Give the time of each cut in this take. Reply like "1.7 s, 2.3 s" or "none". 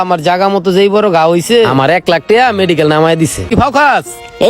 3.5 s